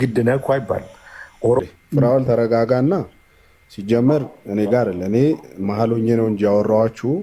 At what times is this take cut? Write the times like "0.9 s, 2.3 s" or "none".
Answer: 1.6 s

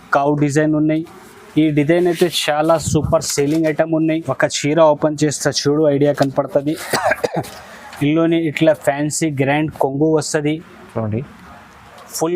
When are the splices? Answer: 4.3 s

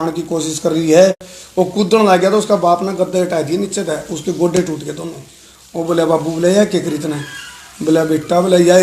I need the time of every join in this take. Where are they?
1.3 s

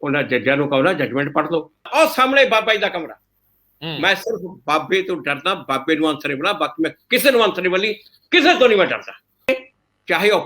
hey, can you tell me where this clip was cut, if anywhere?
1.9 s, 9.5 s

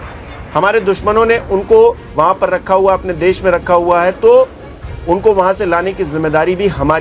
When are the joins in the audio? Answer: none

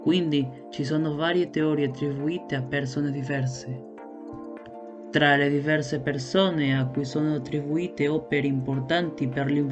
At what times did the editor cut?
none

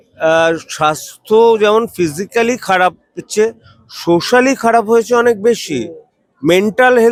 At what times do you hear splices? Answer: none

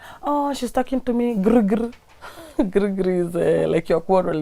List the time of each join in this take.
none

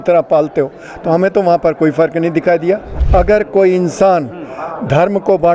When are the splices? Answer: 2.9 s

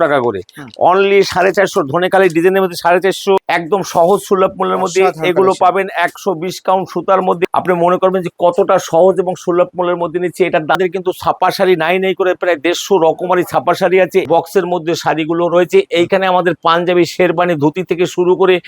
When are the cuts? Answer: 3.4 s, 7.5 s, 10.8 s, 14.3 s

